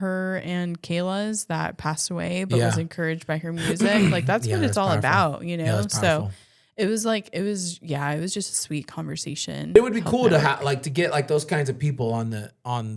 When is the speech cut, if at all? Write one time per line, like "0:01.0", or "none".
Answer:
0:09.8